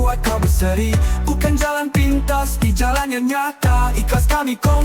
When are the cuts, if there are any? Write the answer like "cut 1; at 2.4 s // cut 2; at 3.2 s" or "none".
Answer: none